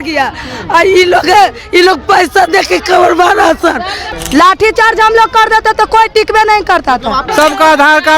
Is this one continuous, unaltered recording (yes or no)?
no